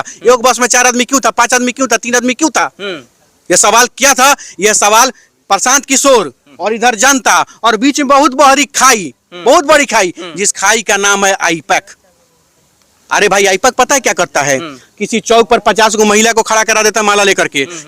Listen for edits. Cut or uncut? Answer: uncut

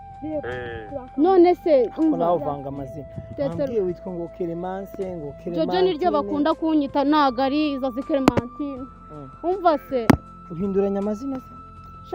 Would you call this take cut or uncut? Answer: uncut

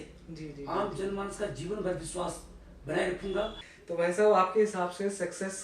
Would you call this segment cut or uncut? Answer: cut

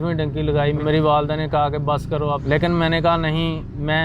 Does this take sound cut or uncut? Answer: cut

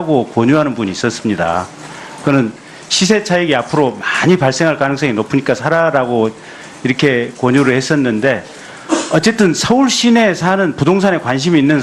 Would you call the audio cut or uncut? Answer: cut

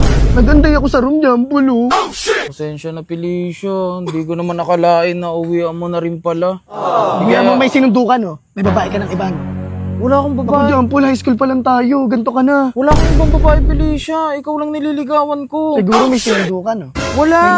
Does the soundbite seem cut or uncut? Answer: uncut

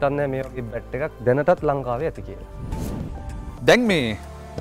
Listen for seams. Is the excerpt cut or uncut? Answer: uncut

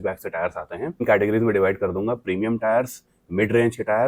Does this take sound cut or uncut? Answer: cut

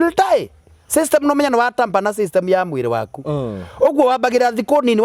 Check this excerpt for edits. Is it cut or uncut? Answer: uncut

